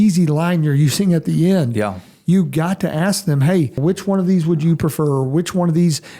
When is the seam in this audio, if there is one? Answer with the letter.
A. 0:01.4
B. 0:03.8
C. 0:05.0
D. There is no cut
B